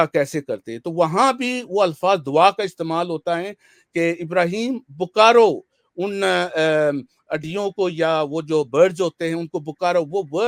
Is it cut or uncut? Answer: uncut